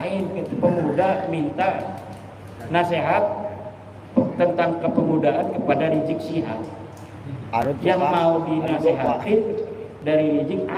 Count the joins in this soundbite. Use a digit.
0